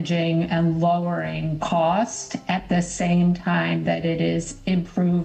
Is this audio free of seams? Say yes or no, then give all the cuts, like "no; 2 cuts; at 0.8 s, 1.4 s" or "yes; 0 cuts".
yes; 0 cuts